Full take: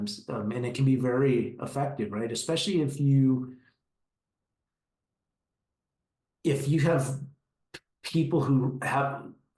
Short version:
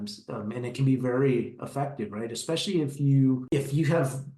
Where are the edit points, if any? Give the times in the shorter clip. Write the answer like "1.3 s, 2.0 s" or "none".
3.4 s